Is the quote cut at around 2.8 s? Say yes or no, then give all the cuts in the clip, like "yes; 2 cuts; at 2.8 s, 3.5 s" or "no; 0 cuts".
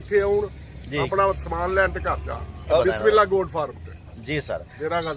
yes; 1 cut; at 2.8 s